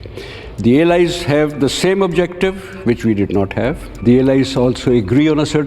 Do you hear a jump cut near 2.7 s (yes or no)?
no